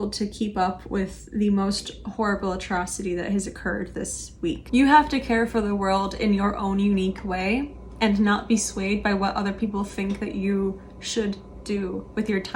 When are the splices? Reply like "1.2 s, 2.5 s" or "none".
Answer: 4.6 s